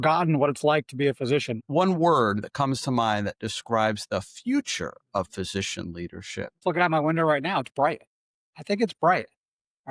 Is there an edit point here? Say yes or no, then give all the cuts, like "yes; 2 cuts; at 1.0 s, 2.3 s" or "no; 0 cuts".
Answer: yes; 2 cuts; at 1.6 s, 6.6 s